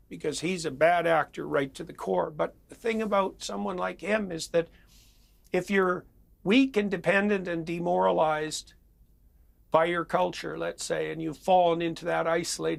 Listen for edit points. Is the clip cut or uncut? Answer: uncut